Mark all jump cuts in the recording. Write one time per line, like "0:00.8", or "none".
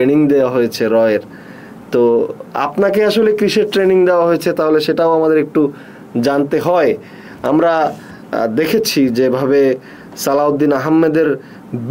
none